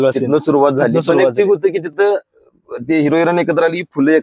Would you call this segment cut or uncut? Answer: uncut